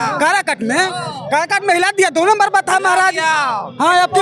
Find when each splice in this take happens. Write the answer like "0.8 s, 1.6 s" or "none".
none